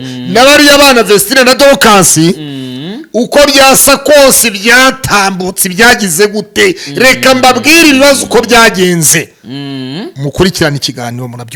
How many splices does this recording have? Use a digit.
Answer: 0